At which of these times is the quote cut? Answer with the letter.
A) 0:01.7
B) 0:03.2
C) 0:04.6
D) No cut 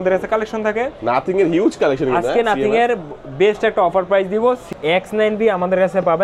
C